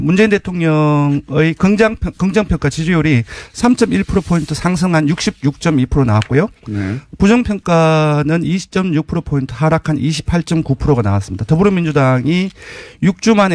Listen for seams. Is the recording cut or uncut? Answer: uncut